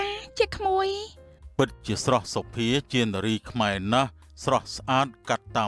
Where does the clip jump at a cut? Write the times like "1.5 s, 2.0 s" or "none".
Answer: none